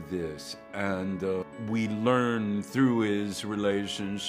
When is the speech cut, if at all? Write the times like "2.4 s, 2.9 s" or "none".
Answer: 1.5 s